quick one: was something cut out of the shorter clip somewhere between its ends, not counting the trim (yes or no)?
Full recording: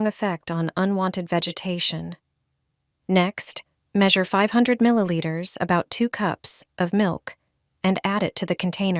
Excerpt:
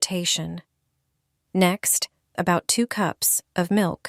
yes